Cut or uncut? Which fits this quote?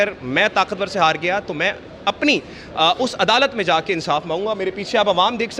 uncut